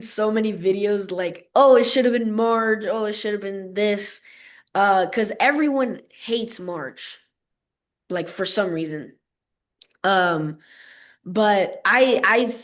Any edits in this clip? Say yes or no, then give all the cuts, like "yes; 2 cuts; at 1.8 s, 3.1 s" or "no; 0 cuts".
no; 0 cuts